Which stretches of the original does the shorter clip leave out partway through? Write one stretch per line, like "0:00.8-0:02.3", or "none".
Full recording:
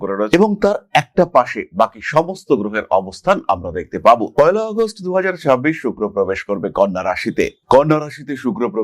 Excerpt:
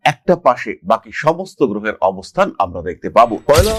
none

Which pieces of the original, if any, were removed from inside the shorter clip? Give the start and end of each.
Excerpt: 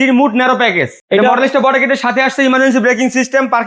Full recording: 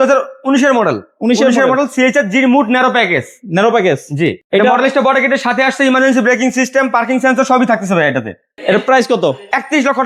0:03.3-0:04.4

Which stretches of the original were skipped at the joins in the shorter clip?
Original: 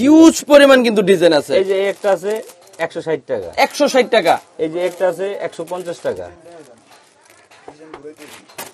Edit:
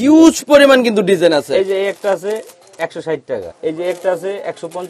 0:03.5-0:04.4

